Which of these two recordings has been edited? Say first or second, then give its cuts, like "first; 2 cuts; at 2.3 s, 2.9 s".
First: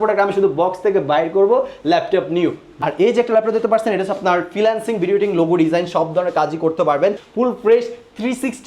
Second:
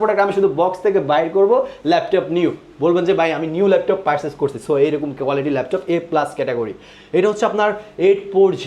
first; 2 cuts; at 2.7 s, 7.2 s